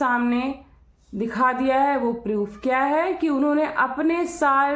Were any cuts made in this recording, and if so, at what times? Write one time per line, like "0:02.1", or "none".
none